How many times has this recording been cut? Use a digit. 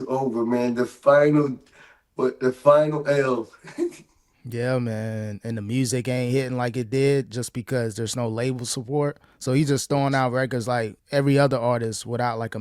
1